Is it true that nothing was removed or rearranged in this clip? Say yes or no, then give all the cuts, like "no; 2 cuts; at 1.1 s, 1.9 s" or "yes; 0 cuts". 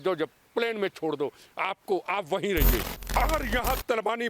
no; 1 cut; at 2.9 s